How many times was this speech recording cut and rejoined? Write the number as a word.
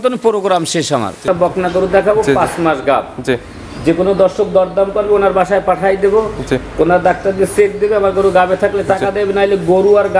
one